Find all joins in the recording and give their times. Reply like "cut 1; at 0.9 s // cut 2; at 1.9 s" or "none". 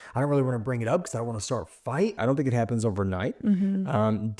cut 1; at 2.2 s